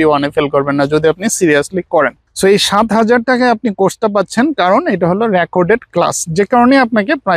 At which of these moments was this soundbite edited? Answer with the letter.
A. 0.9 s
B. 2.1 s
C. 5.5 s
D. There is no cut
D